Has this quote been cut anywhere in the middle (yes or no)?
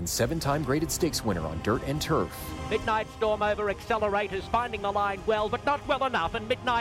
no